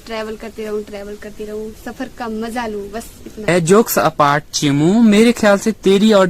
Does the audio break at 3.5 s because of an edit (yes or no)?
yes